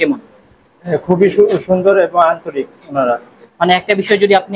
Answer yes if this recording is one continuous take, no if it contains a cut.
yes